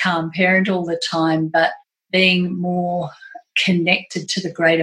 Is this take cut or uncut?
uncut